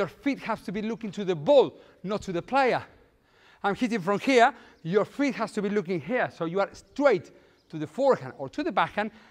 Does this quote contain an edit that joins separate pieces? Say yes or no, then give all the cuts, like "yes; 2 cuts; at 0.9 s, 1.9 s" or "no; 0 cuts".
no; 0 cuts